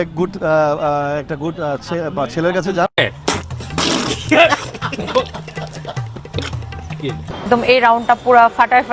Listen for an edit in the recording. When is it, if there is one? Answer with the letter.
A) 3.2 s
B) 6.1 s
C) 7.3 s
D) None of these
C